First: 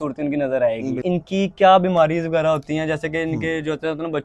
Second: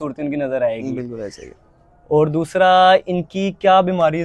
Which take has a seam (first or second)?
first